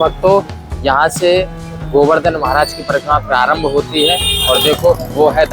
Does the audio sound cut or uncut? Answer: uncut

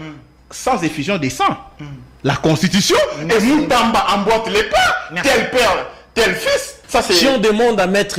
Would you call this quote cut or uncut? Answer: cut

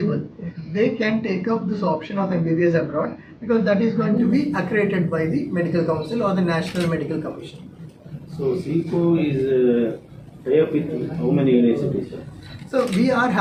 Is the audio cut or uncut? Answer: uncut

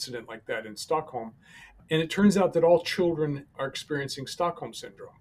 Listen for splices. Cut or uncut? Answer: cut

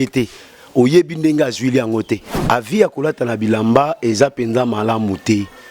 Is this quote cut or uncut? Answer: cut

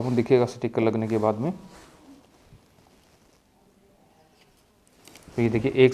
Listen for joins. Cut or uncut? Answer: uncut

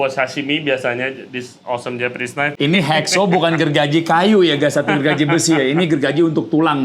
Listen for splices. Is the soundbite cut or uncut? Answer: cut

